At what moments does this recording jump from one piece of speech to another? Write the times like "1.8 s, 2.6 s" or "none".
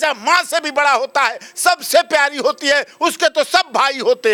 none